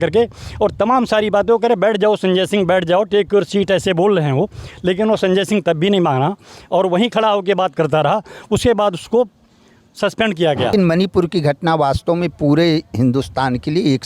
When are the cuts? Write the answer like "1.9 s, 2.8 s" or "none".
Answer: 10.7 s